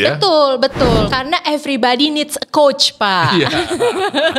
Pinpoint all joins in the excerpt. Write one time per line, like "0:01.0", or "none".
0:01.0